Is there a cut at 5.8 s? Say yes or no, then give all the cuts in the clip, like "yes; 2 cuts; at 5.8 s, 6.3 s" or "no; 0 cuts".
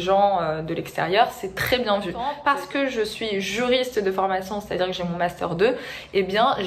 no; 1 cut; at 2.4 s